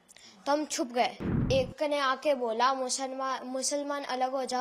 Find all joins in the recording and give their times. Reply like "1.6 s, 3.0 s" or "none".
1.4 s